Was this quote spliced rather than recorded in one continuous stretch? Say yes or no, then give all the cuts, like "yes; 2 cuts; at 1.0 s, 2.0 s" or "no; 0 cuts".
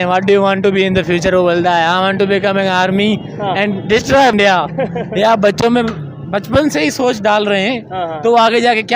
yes; 1 cut; at 4.3 s